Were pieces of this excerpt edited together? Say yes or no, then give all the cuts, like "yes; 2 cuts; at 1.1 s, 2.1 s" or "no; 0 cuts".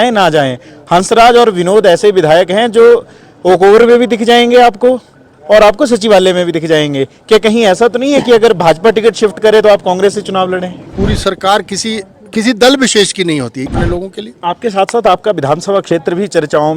yes; 2 cuts; at 10.9 s, 13.6 s